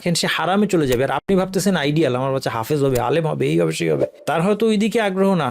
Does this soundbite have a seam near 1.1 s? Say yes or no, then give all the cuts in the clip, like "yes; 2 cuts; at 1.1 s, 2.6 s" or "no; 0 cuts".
no; 1 cut; at 4.1 s